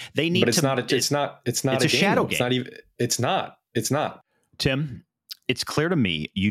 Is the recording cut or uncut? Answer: cut